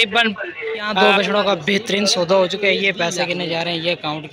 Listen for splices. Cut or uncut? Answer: cut